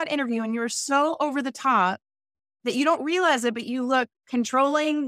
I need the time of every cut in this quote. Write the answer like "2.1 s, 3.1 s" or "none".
none